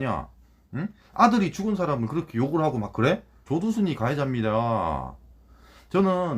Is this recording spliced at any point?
yes; 1 cut; at 3.4 s

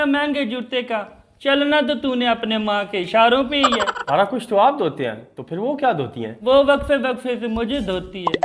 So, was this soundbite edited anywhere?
yes; 1 cut; at 4.0 s

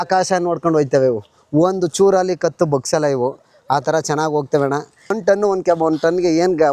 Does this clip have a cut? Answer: yes; 1 cut; at 5.1 s

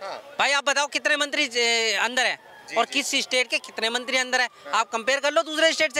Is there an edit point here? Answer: no; 0 cuts

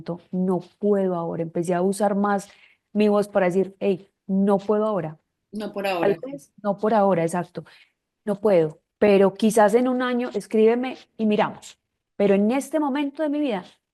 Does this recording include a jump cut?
no; 0 cuts

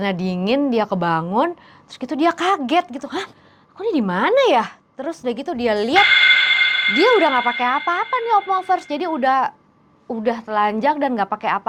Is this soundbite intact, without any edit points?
yes; 0 cuts

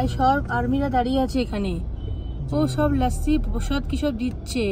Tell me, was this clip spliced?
no; 0 cuts

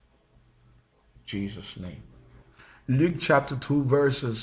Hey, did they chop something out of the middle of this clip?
no; 0 cuts

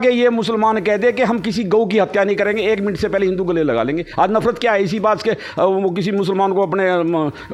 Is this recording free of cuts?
yes; 0 cuts

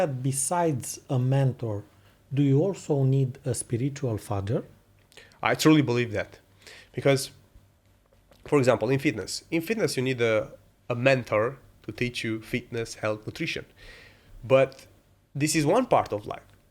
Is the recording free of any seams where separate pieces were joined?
yes; 0 cuts

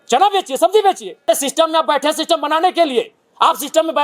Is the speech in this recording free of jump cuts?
no; 1 cut; at 1.3 s

